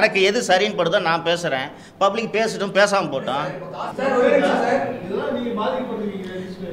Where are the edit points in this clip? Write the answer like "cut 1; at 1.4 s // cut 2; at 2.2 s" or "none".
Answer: cut 1; at 3.9 s